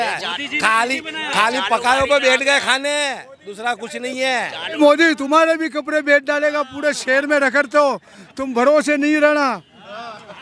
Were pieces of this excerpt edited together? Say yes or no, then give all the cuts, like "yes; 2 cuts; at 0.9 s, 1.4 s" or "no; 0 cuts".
yes; 1 cut; at 4.8 s